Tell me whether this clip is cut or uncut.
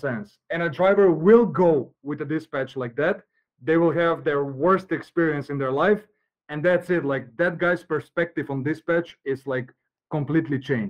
uncut